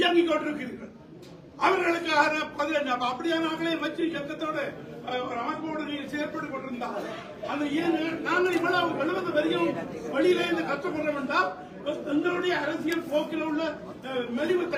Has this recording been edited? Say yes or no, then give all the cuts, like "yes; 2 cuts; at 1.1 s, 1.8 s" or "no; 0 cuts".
no; 0 cuts